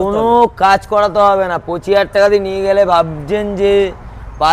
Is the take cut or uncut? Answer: uncut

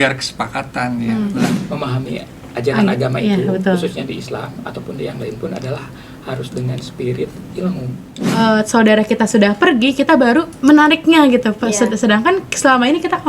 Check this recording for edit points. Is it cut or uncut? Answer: cut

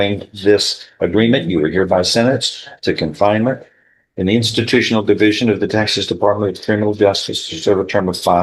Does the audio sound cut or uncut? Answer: uncut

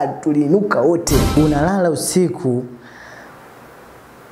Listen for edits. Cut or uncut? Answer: cut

